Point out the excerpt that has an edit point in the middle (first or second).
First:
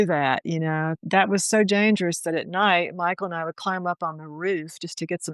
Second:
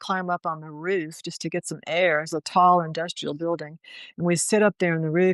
first